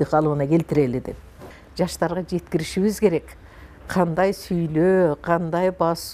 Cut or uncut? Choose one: cut